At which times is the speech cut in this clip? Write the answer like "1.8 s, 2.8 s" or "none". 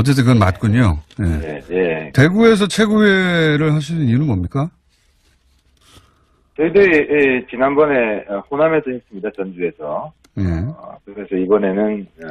3.1 s